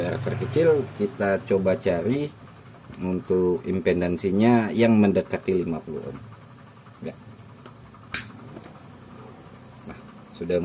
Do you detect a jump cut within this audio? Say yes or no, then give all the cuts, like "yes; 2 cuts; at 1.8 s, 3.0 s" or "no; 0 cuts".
no; 0 cuts